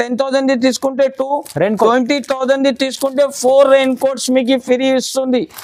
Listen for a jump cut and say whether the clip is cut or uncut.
uncut